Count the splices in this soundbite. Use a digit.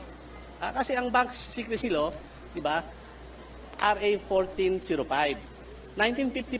0